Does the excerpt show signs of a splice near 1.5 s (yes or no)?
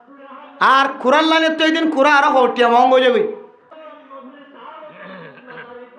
no